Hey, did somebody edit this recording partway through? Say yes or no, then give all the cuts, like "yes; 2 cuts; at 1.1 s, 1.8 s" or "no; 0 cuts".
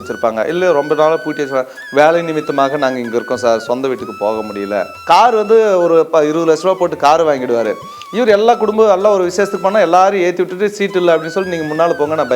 yes; 1 cut; at 4.9 s